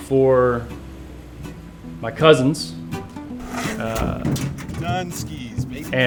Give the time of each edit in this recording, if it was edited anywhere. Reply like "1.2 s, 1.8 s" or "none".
none